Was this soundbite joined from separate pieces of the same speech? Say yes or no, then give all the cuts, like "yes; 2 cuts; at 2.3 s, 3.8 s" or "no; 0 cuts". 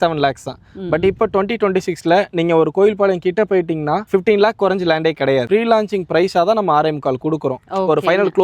yes; 1 cut; at 5.5 s